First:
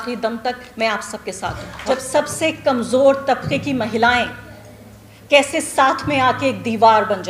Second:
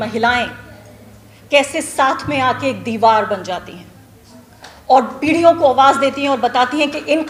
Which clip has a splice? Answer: first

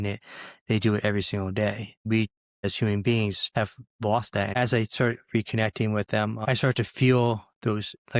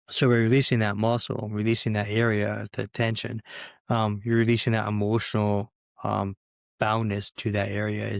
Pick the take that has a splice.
first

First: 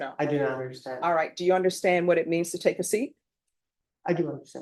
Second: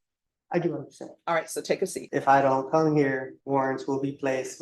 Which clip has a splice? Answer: second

